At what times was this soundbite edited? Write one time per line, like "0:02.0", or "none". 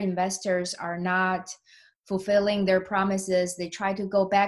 none